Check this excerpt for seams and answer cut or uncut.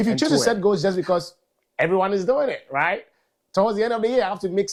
uncut